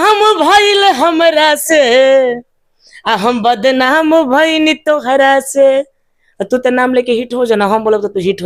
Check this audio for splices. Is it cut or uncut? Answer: uncut